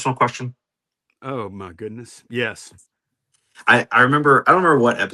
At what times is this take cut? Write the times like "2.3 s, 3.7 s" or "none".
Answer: none